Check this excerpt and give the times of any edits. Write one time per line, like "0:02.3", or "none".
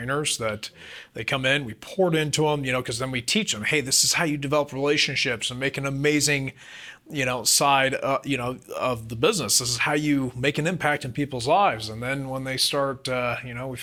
none